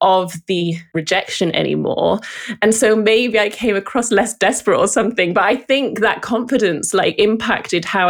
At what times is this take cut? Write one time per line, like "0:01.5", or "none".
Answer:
0:03.3